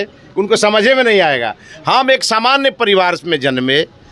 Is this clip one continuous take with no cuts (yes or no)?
yes